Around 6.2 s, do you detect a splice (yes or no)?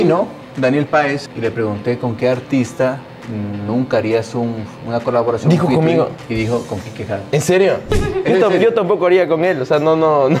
yes